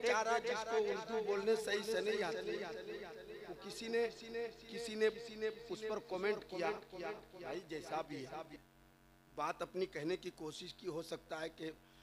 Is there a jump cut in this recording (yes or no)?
no